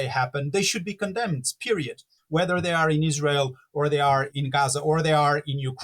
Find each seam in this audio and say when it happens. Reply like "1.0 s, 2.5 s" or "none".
2.1 s, 4.3 s

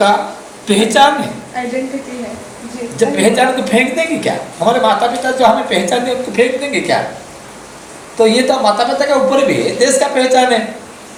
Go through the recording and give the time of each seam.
none

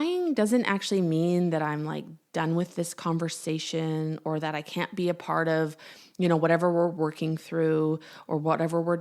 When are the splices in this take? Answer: none

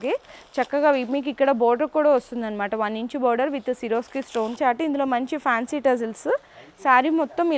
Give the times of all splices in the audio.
4.6 s

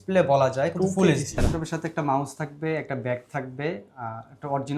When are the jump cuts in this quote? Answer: 1.4 s

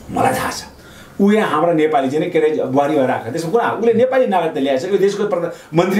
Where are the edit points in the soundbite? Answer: none

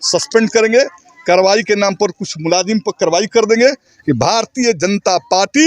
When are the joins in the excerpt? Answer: 3.9 s

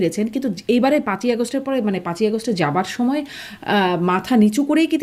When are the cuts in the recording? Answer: none

